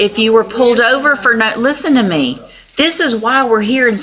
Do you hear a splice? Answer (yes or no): no